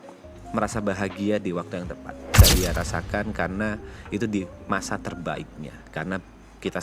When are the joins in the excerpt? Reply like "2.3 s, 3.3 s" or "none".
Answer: 2.3 s

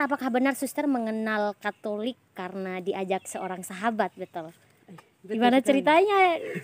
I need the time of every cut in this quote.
none

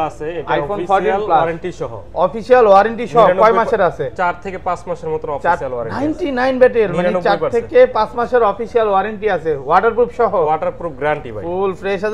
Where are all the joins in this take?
none

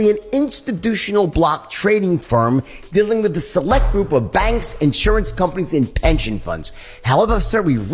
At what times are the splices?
none

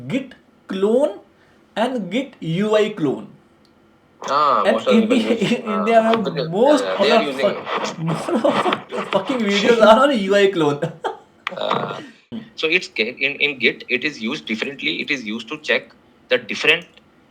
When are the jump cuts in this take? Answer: 12.2 s

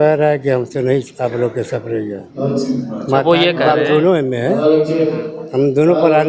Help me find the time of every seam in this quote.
none

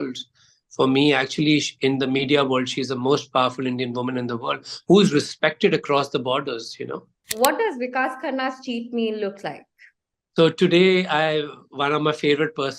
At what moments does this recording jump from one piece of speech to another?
7.3 s

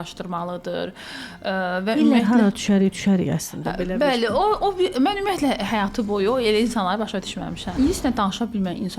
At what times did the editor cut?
7.7 s

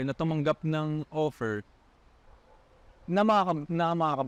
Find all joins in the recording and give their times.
none

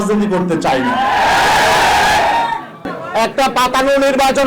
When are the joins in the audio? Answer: 2.7 s

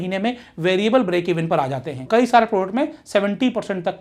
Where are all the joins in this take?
1.9 s

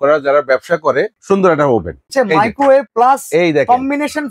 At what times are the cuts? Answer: 1.2 s, 2.1 s, 2.9 s

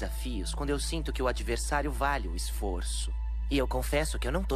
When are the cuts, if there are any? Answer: none

